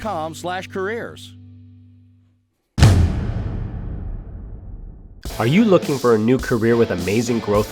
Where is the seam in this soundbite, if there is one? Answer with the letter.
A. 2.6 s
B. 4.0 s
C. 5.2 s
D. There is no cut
A